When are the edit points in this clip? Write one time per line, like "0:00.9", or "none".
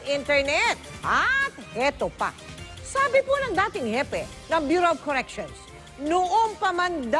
0:01.7